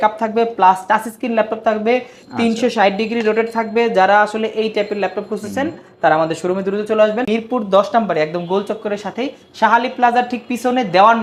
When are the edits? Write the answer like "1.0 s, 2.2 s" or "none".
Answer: 7.3 s